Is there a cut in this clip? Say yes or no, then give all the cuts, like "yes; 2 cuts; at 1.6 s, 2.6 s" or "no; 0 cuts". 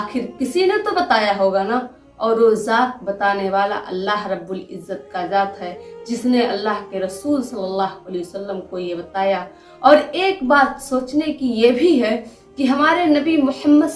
no; 0 cuts